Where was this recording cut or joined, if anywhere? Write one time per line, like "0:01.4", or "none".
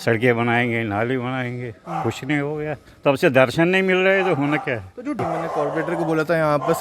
0:05.2